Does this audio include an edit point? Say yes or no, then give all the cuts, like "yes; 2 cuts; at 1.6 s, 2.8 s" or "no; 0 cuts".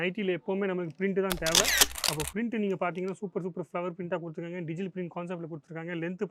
no; 0 cuts